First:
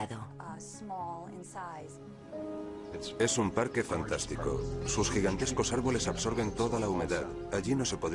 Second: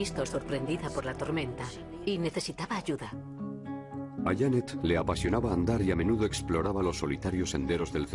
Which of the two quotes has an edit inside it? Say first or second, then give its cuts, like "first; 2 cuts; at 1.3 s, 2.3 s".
first; 1 cut; at 6.5 s